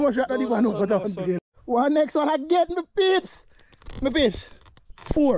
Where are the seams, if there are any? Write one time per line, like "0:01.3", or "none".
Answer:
0:01.5